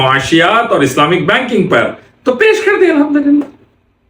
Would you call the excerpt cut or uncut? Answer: uncut